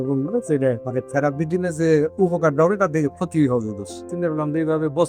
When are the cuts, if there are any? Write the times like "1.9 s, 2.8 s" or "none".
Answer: 0.8 s, 4.1 s